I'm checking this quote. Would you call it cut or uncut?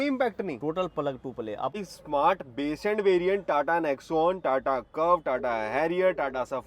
cut